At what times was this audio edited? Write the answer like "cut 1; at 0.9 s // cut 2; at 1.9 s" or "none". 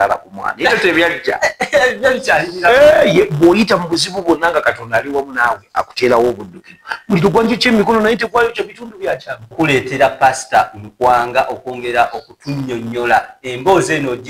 cut 1; at 9.5 s